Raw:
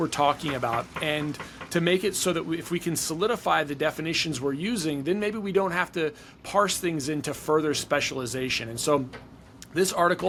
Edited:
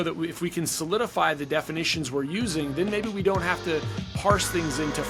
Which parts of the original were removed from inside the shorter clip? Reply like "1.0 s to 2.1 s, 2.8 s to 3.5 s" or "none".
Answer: none